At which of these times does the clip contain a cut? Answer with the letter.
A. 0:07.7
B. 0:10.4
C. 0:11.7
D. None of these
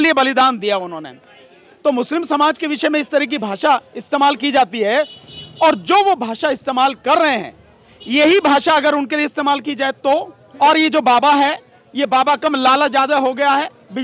B